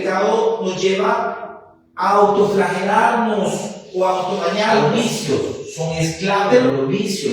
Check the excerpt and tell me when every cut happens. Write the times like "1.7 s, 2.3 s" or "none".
4.8 s